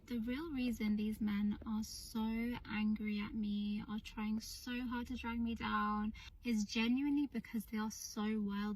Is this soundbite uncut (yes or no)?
no